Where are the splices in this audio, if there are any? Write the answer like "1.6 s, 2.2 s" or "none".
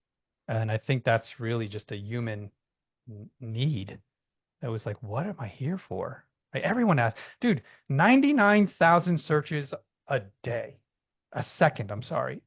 none